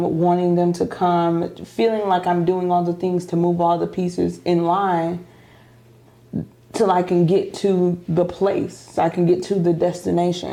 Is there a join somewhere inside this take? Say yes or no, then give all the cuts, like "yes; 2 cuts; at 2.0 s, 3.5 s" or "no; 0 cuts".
no; 0 cuts